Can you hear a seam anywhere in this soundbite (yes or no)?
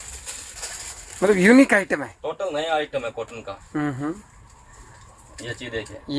no